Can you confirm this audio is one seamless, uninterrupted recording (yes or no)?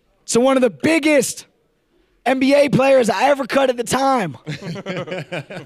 no